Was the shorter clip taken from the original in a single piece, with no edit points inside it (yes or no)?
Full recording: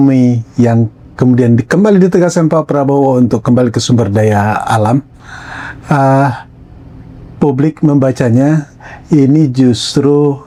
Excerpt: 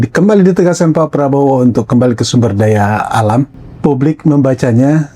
no